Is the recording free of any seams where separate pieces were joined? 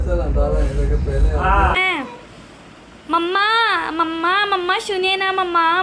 no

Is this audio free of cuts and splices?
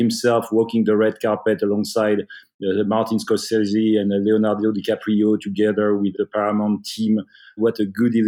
yes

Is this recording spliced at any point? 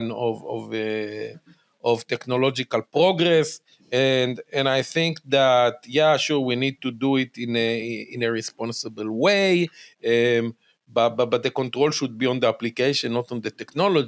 no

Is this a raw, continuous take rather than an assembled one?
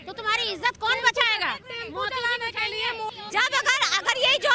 no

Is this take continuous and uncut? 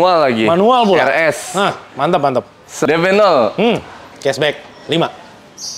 no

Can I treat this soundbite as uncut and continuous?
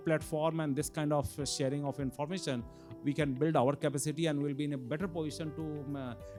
yes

